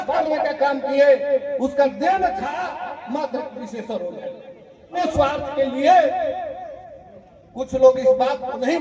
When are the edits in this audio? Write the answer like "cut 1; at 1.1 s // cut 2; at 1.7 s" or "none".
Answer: cut 1; at 5.0 s